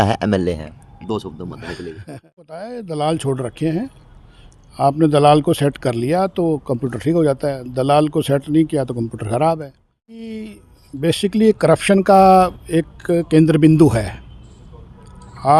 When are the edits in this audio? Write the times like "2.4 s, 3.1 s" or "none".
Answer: 2.1 s, 10.2 s